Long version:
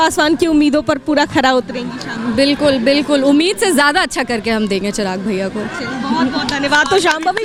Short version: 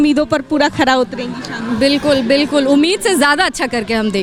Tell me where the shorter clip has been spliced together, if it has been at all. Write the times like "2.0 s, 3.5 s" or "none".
none